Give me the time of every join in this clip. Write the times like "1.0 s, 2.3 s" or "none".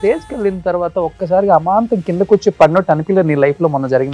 none